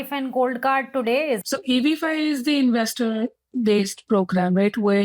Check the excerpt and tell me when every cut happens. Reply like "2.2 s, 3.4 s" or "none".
1.4 s